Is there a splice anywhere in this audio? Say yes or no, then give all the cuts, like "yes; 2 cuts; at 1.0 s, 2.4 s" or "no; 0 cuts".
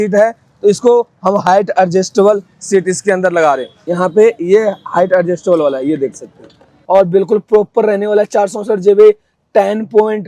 yes; 2 cuts; at 3.8 s, 6.7 s